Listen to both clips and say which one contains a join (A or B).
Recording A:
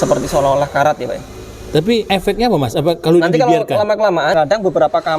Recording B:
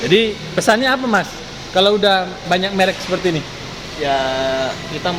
A